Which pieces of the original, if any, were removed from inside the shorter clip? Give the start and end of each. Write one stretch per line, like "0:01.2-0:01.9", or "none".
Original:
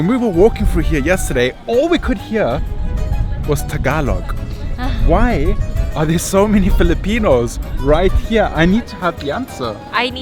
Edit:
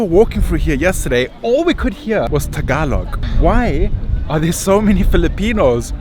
0:02.5-0:03.4
0:04.4-0:04.9